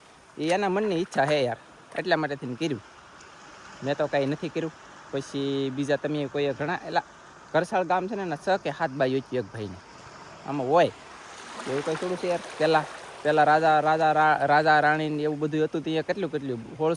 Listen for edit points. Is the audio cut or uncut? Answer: uncut